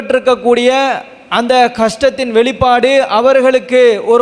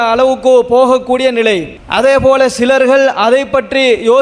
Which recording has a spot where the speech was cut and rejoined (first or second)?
second